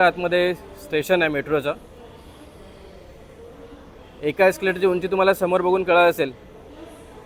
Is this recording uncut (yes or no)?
yes